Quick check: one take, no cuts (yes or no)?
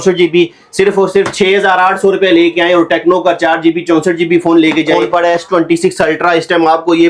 no